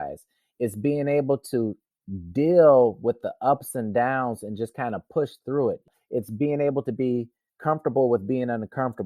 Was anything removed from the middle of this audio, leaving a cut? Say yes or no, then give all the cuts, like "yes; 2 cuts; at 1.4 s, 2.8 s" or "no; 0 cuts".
no; 0 cuts